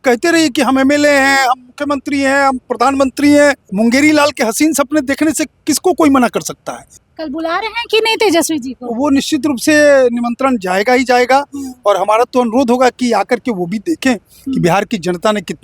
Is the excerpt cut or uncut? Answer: cut